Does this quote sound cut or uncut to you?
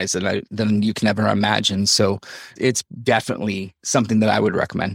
uncut